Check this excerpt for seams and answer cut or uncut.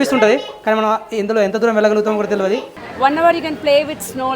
cut